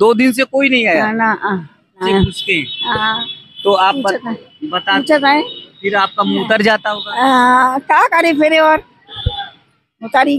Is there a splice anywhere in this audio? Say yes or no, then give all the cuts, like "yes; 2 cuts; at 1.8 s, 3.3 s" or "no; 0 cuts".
yes; 1 cut; at 2.1 s